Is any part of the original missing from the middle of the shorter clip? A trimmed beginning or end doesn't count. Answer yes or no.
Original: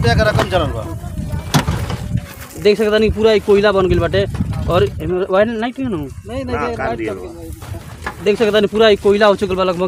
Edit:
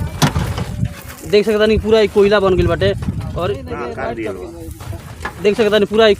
yes